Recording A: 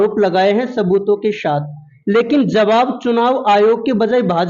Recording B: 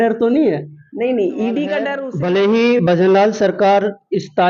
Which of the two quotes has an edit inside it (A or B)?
B